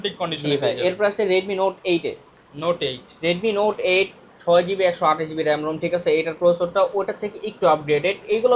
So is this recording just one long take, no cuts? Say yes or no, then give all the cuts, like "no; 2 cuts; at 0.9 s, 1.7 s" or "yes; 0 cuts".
yes; 0 cuts